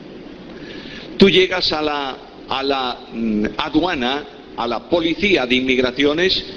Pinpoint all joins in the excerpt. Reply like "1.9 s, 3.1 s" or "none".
2.0 s